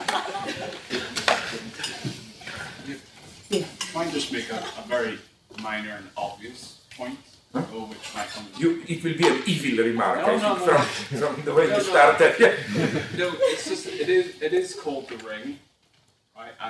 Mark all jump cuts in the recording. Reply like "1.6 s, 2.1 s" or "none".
12.2 s